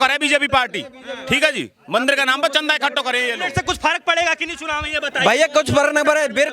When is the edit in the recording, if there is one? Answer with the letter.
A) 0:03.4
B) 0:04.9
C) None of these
A